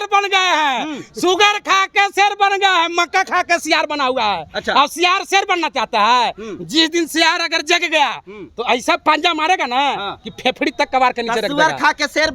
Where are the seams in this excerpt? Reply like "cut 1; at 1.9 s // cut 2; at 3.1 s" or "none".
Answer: none